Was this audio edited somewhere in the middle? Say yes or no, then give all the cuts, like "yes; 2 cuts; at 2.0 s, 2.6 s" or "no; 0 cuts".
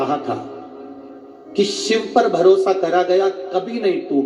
no; 0 cuts